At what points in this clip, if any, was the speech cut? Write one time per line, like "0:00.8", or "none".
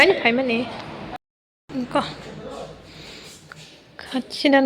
0:01.2